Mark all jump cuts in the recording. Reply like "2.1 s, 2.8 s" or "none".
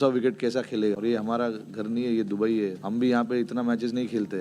1.0 s

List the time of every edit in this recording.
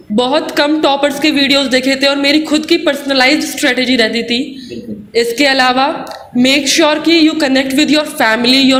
none

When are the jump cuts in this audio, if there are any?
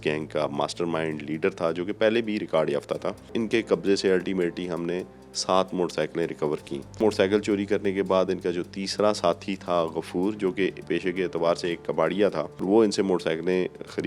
3.3 s, 7.0 s, 12.6 s

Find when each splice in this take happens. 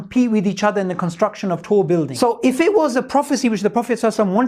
2.1 s

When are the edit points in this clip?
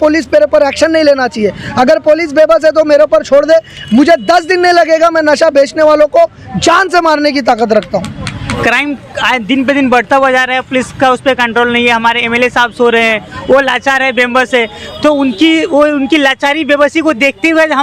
8.6 s

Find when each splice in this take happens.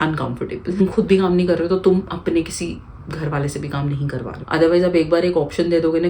0.8 s, 4.4 s

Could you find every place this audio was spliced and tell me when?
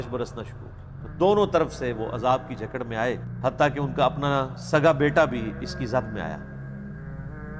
3.4 s

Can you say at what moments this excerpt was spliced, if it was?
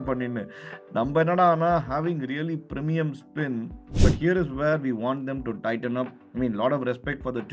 3.8 s

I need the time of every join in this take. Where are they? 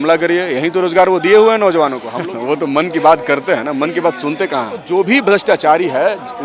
2.1 s, 4.8 s

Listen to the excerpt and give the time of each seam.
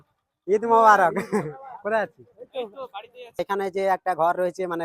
3.4 s

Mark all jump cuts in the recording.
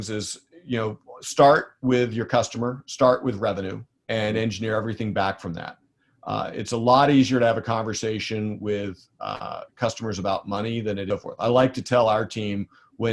11.1 s

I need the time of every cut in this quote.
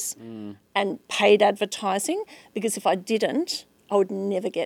none

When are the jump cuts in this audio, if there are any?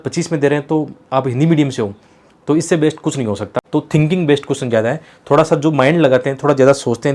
3.6 s

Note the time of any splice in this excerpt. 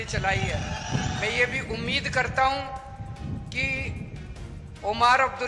1.2 s

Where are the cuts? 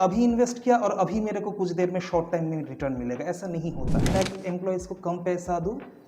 4.1 s

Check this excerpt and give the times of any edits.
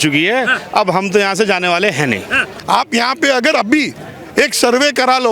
2.5 s

